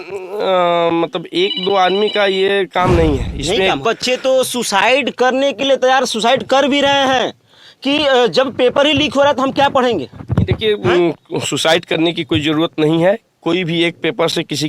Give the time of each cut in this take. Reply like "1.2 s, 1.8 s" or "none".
3.8 s